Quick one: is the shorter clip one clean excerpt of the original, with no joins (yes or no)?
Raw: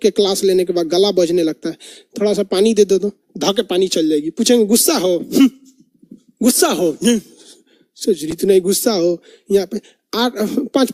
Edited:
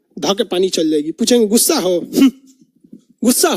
yes